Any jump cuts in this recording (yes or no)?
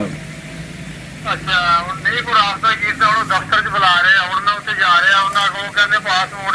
no